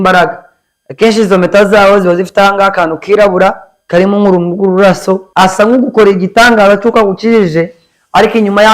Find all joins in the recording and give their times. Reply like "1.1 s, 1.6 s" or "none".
3.7 s, 5.3 s